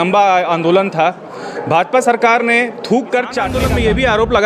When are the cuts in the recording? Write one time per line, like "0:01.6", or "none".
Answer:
0:03.5